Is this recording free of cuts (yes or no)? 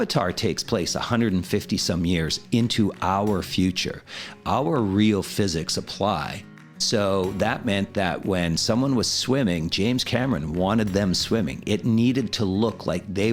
yes